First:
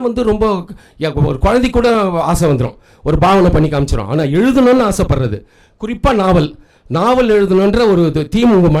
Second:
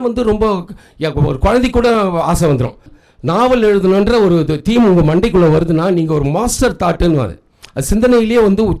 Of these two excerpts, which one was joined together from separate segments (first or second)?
second